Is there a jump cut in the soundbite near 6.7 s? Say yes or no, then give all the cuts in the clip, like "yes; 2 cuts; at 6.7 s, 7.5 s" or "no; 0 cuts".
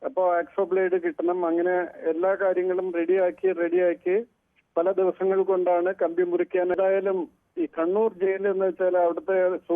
yes; 1 cut; at 6.7 s